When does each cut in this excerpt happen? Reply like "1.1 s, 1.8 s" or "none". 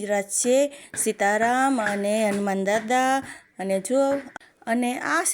4.4 s